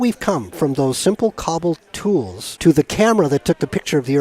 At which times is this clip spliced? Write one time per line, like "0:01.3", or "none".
0:02.4